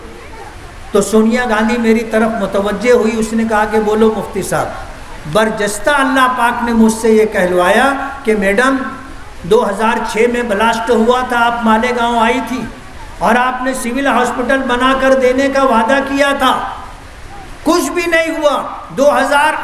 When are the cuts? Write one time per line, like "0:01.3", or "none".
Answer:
none